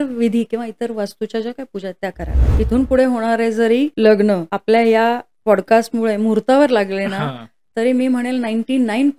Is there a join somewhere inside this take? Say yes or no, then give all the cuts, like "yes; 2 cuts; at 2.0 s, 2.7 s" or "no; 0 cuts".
yes; 3 cuts; at 2.4 s, 3.9 s, 4.5 s